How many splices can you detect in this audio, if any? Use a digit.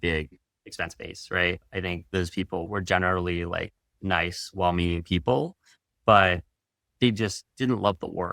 1